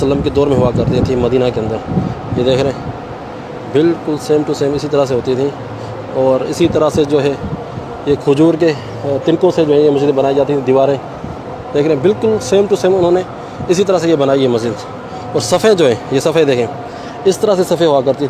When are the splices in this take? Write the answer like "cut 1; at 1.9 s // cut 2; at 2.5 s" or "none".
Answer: none

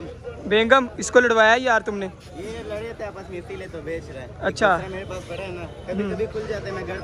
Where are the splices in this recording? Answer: none

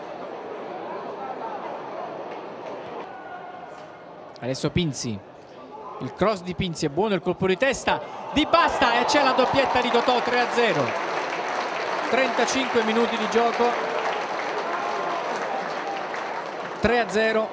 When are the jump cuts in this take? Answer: cut 1; at 5.2 s

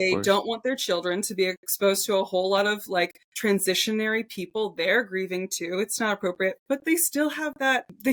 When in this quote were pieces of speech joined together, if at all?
none

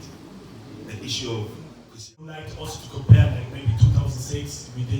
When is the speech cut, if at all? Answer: cut 1; at 2.3 s

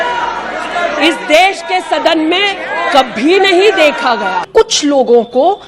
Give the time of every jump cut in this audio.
cut 1; at 4.5 s

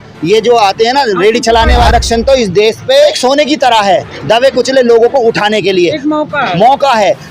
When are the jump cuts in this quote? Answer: cut 1; at 1.9 s // cut 2; at 3.2 s

